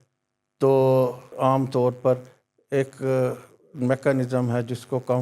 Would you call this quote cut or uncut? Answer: cut